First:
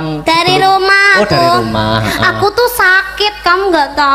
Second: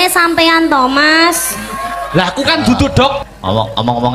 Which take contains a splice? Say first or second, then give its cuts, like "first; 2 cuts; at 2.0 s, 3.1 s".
second; 1 cut; at 3.2 s